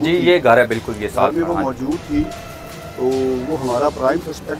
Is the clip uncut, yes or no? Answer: yes